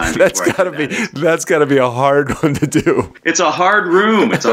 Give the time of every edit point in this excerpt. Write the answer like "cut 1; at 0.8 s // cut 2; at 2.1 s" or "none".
cut 1; at 3.2 s